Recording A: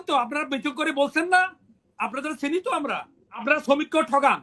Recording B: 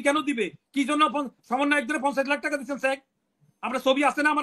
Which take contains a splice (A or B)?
A